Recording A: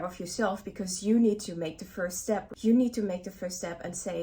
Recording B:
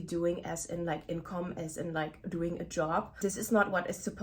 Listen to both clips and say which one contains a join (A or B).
B